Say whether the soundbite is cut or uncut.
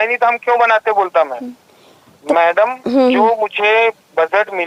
uncut